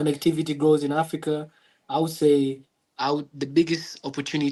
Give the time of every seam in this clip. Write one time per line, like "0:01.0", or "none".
none